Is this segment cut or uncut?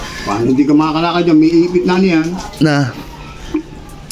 uncut